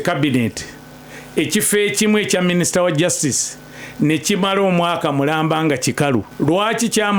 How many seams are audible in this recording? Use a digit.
1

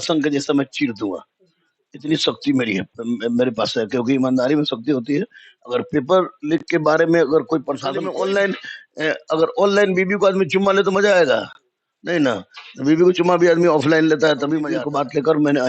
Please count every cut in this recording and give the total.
2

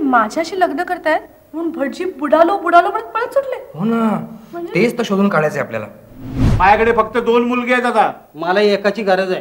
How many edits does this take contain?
1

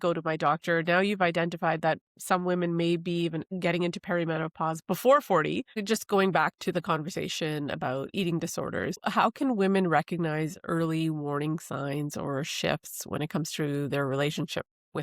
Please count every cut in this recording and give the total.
1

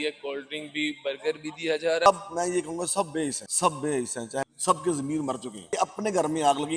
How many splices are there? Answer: 3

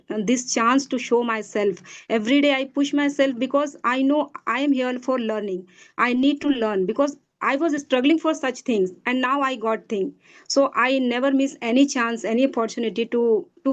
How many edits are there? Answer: 0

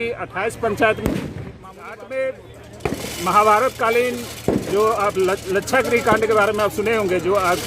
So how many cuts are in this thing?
1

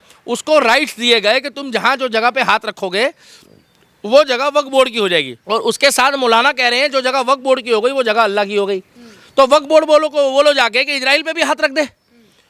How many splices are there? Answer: 0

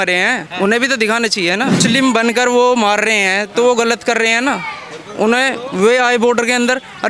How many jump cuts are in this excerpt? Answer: 1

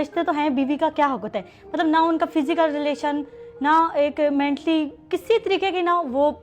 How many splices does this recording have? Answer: 0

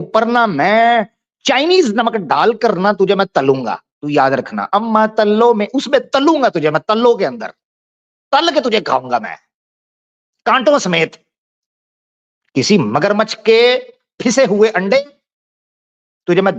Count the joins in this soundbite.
0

